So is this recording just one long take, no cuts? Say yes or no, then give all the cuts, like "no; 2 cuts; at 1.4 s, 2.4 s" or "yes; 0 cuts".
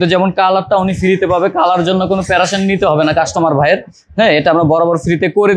yes; 0 cuts